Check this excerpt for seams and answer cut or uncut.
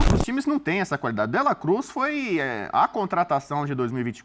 uncut